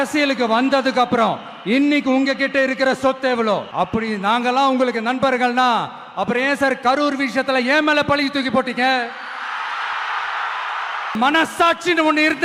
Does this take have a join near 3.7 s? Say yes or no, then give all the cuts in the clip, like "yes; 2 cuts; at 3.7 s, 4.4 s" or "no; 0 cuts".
yes; 2 cuts; at 3.7 s, 11.1 s